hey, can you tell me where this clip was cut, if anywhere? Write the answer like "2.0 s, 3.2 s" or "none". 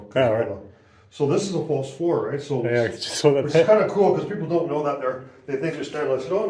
none